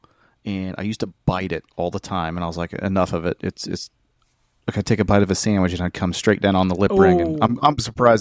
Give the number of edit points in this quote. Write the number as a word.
zero